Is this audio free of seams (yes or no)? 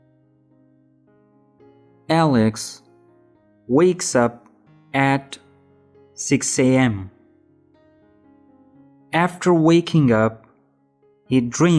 no